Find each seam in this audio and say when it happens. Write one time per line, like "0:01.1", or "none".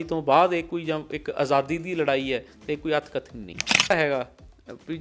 0:03.9